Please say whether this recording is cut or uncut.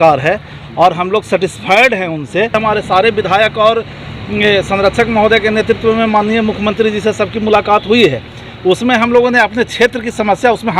cut